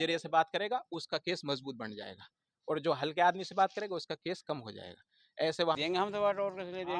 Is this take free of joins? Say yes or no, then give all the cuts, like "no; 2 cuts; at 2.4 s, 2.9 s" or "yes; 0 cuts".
no; 1 cut; at 5.8 s